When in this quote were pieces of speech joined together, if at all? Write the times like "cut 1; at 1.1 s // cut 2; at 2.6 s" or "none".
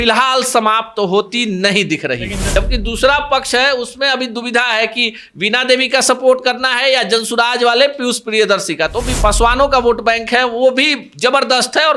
cut 1; at 2.4 s // cut 2; at 9.2 s